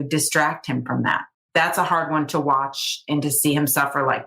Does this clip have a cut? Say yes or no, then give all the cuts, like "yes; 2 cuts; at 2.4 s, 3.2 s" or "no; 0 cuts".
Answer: yes; 1 cut; at 1.5 s